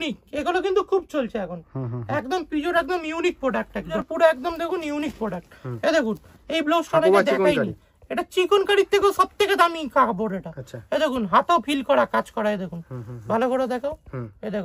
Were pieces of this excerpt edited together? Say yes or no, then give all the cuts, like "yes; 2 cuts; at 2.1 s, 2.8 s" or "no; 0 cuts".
no; 0 cuts